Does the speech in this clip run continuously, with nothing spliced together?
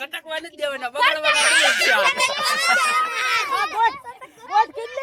yes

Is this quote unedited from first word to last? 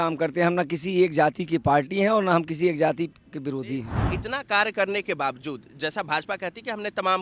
no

